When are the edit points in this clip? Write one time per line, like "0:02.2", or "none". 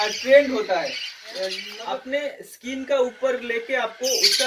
0:01.7